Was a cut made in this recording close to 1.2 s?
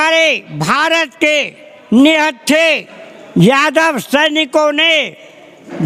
no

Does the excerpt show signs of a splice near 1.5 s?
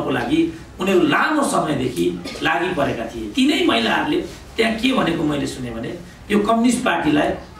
no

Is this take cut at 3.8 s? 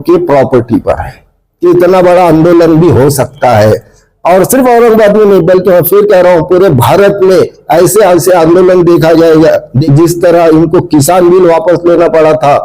no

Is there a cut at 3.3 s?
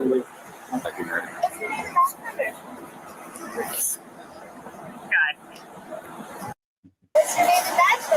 no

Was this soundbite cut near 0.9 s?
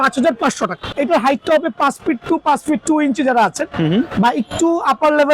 yes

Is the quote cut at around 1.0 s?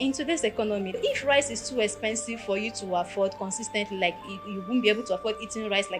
yes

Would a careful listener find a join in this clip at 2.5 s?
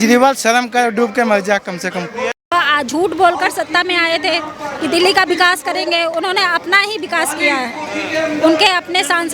yes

